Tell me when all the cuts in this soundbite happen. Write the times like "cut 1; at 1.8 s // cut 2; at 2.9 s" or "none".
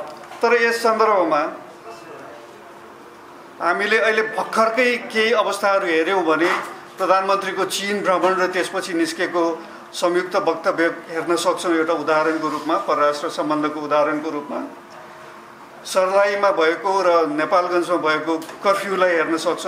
none